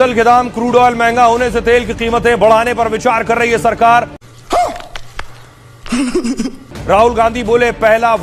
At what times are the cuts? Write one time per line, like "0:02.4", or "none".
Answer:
none